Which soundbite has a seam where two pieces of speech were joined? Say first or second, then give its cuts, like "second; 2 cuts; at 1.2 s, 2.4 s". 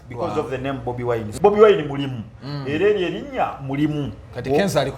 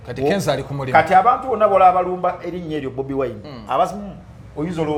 first; 1 cut; at 1.3 s